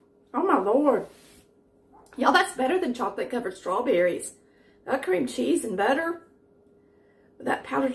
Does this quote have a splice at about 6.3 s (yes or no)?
no